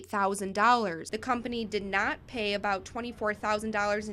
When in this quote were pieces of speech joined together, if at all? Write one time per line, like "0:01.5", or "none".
0:01.1

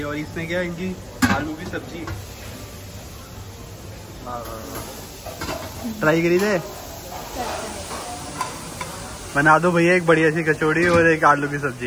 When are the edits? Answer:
none

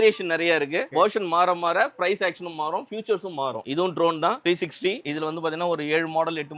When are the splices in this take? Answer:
0:03.6
0:05.0

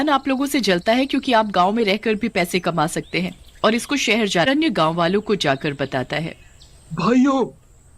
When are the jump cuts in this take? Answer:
0:04.5

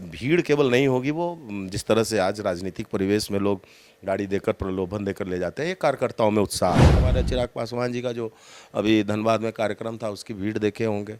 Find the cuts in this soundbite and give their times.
0:07.0

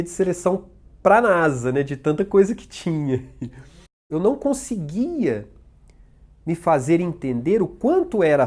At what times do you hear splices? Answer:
0:04.1

